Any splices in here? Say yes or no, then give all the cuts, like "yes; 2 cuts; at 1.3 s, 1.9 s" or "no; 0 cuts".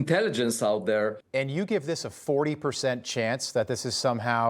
yes; 1 cut; at 1.2 s